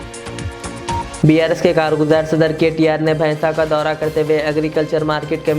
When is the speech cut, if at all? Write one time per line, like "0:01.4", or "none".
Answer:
0:01.2